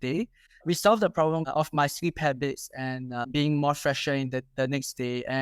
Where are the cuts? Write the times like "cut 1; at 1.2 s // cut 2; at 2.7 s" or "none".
cut 1; at 1.4 s // cut 2; at 3.3 s